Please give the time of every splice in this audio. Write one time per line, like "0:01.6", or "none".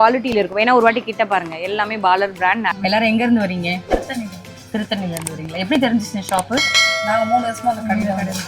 0:02.7